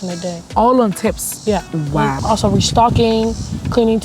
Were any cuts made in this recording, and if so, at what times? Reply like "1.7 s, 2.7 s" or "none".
2.2 s